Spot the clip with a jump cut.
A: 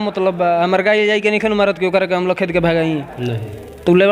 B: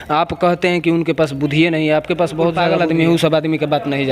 B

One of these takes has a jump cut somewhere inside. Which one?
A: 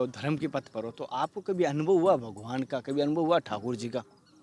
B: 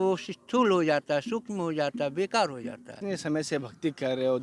B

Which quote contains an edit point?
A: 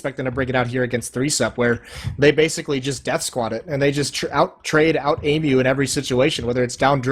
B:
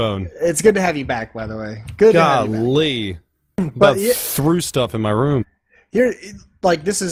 A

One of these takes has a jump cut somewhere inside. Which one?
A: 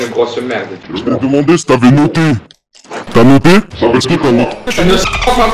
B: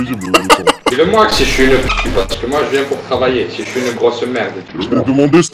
B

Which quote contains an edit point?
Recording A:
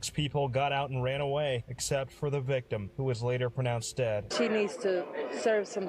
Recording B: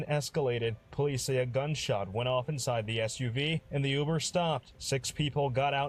A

